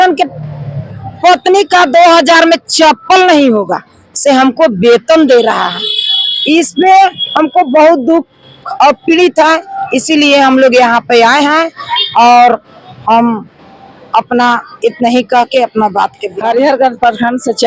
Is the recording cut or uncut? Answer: uncut